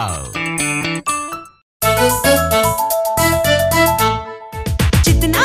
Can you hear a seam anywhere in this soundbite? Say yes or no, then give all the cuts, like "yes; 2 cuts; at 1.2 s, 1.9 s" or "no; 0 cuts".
yes; 1 cut; at 1.7 s